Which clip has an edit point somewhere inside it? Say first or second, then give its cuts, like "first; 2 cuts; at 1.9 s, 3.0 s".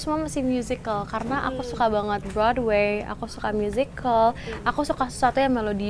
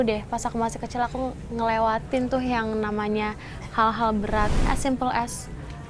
second; 1 cut; at 4.7 s